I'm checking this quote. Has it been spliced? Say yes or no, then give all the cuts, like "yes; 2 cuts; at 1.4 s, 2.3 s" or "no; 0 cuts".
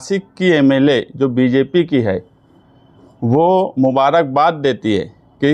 no; 0 cuts